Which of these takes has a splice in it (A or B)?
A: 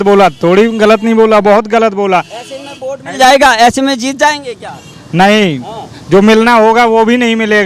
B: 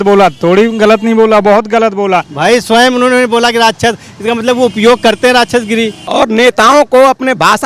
B